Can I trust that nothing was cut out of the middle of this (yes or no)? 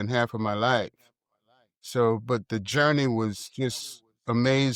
yes